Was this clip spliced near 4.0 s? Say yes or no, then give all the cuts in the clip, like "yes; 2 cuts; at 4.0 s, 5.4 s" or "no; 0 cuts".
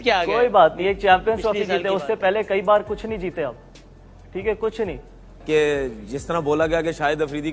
no; 1 cut; at 5.4 s